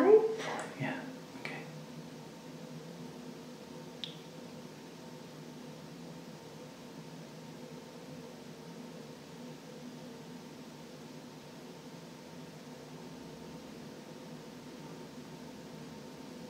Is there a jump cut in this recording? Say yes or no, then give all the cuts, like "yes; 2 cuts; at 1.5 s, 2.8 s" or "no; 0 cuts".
no; 0 cuts